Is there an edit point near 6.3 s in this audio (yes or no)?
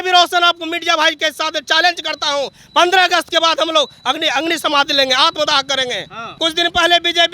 yes